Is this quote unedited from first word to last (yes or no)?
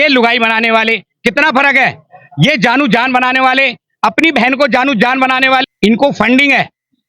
no